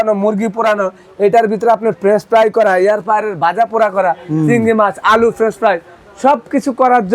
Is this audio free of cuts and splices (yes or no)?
yes